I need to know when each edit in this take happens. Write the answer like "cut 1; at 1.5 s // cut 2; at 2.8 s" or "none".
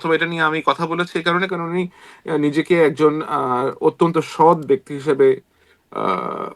none